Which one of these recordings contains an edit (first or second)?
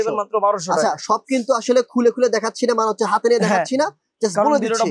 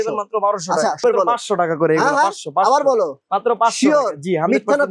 second